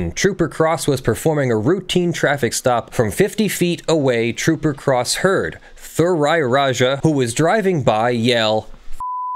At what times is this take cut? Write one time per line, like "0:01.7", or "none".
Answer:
0:02.9
0:07.0